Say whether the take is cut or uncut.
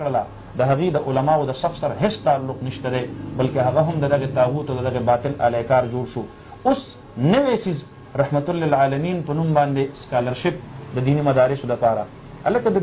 uncut